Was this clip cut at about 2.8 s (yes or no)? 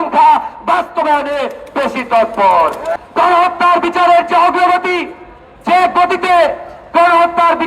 yes